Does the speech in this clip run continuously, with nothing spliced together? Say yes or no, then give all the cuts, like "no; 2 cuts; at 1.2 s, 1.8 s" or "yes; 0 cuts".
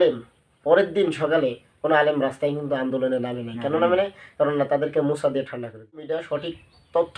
no; 1 cut; at 6.2 s